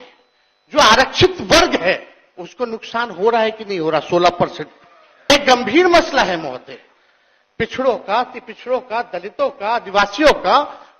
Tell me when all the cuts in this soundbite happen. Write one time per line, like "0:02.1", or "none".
0:05.3